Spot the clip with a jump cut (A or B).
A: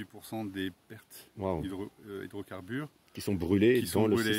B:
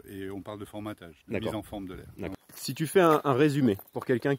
B